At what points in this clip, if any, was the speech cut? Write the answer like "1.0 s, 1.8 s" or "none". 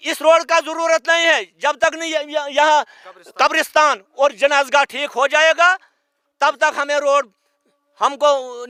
none